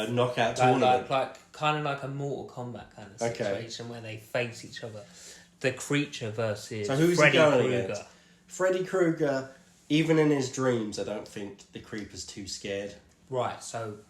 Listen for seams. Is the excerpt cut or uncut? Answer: cut